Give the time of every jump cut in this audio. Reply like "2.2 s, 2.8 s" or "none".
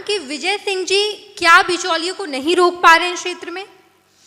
none